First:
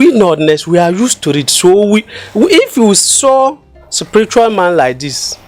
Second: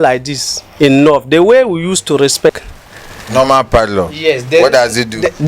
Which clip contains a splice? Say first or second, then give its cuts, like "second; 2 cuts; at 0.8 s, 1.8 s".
second; 1 cut; at 2.6 s